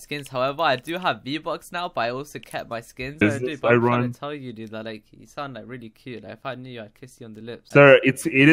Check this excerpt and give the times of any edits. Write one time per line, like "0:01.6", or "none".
0:03.2
0:07.6